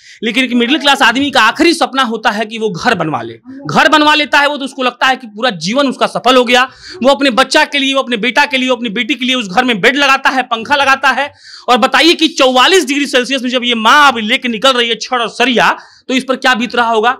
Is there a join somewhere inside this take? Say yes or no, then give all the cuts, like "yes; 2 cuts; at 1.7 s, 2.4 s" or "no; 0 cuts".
no; 0 cuts